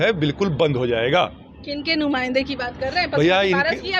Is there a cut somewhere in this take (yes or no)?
no